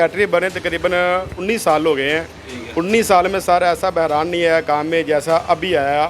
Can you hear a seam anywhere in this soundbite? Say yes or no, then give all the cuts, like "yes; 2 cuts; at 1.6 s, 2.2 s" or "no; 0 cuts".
no; 0 cuts